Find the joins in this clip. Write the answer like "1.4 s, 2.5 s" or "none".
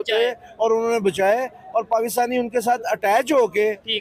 none